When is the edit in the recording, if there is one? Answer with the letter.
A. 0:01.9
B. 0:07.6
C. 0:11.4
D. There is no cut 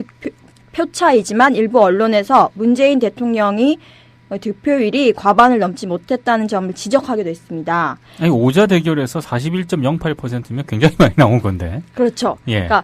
C